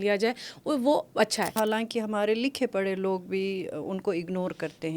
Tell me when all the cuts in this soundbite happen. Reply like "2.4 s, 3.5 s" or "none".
1.6 s